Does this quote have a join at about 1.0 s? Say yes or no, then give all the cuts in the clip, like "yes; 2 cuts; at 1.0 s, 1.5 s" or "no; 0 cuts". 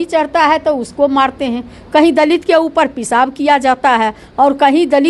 no; 0 cuts